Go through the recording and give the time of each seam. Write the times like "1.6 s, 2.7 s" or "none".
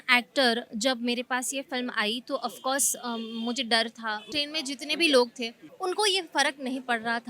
4.3 s